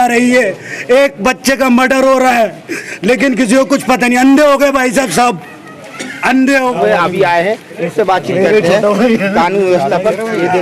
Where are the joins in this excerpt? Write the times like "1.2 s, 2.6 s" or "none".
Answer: 6.7 s

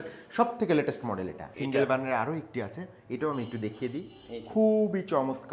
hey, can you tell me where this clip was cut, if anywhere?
1.4 s

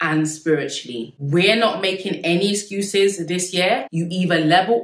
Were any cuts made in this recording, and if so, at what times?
1.0 s, 3.9 s

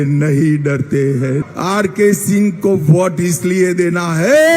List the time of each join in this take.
1.4 s

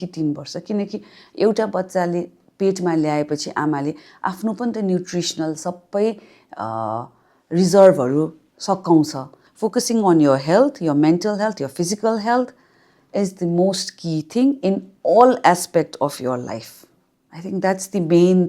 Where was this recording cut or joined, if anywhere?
9.4 s

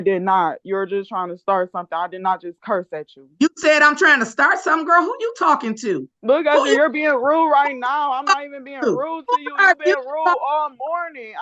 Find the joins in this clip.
6.1 s

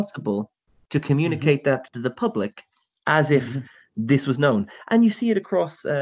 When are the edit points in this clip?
none

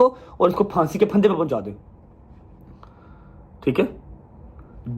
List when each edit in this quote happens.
none

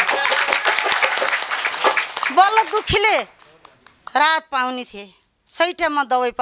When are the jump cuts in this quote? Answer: none

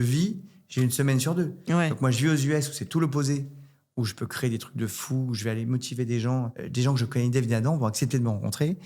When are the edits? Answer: 6.6 s

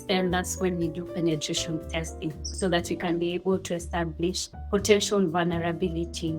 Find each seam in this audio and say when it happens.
2.4 s, 4.5 s

